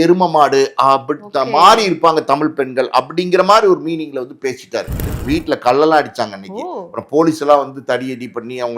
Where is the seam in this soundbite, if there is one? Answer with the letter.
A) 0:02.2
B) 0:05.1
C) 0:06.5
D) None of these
B